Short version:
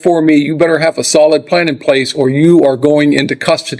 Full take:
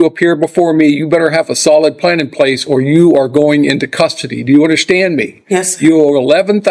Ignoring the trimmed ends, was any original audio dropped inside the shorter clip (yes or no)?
no